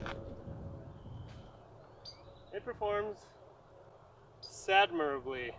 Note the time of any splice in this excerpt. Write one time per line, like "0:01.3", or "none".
0:01.1

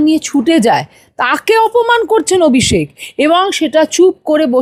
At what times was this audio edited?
none

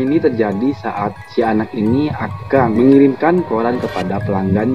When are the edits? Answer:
0:02.7

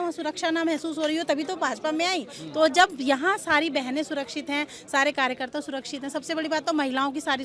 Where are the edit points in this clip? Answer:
none

